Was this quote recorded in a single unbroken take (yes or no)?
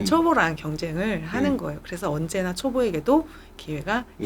yes